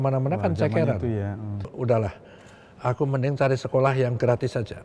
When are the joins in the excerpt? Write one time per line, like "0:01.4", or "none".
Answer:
0:01.7